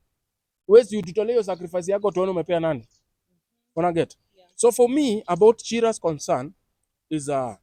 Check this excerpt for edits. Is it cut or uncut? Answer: uncut